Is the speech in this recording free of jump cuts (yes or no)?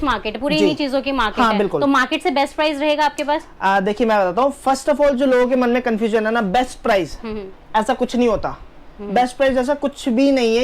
yes